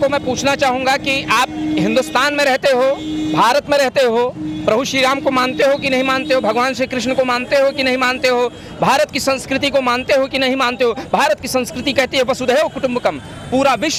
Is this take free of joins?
yes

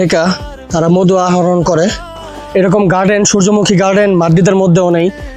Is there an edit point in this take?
yes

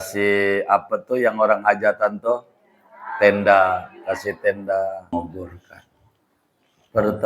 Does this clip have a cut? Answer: yes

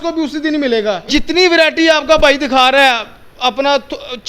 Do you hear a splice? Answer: yes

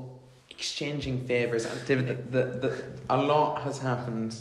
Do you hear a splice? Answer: yes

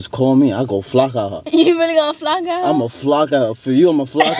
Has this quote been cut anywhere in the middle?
no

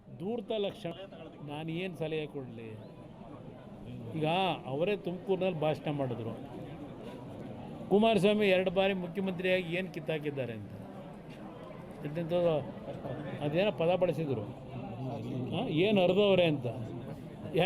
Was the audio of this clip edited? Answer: yes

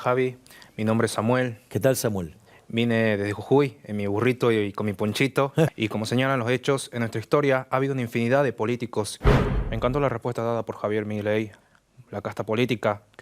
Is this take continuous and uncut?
no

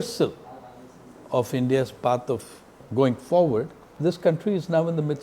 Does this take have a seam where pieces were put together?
yes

